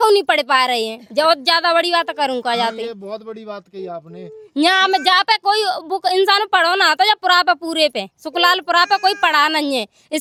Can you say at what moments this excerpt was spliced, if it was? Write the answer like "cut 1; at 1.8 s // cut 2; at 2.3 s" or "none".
none